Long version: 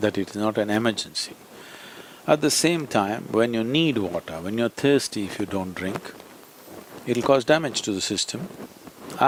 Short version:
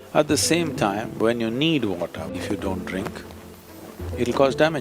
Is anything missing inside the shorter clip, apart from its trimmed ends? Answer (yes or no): yes